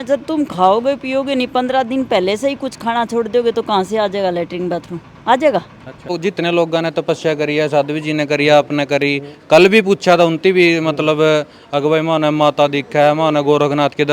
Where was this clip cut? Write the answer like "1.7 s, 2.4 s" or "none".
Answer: 6.1 s

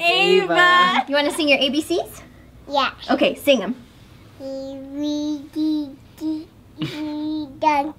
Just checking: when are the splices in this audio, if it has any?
1.1 s

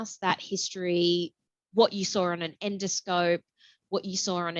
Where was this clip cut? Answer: none

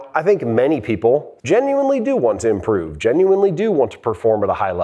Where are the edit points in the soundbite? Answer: 1.3 s

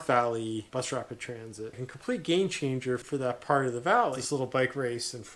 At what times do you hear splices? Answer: 1.7 s, 3.0 s, 4.2 s

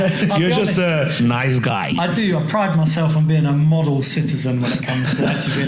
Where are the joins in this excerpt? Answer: none

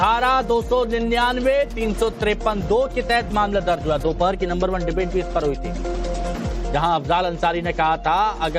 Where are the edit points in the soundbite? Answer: 4.5 s

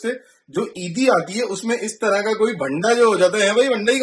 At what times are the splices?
none

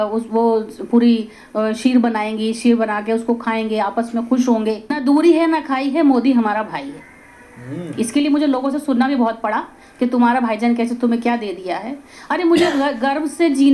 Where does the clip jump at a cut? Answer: 5.0 s

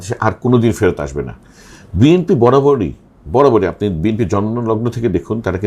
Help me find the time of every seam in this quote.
none

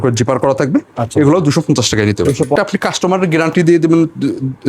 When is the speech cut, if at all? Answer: 2.6 s

